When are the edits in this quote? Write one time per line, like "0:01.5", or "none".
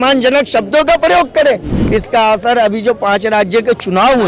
0:01.8